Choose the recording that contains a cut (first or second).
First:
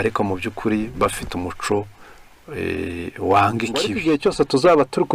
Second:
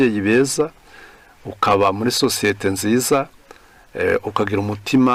first